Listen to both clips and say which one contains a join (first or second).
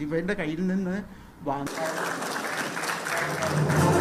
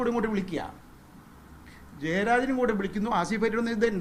first